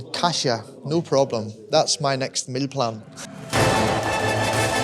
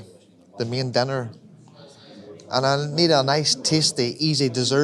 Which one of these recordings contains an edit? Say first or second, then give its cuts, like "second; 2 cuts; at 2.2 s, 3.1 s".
first; 1 cut; at 3.1 s